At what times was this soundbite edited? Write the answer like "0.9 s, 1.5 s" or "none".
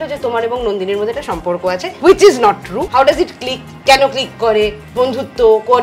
1.9 s, 2.9 s